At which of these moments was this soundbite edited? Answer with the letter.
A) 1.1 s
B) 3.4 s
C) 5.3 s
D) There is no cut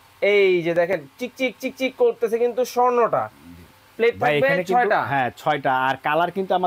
D